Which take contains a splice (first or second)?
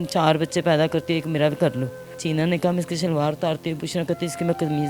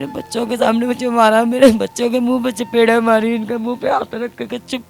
first